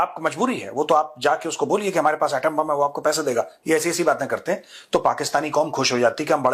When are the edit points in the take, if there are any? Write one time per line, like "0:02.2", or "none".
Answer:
none